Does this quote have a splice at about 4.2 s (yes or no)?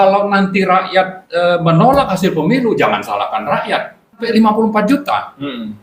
yes